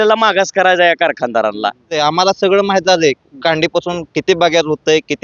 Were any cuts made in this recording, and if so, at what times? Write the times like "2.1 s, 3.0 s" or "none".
2.0 s